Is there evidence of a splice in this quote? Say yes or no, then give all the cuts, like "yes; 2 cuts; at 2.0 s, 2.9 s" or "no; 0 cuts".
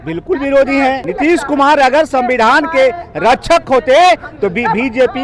yes; 1 cut; at 1.0 s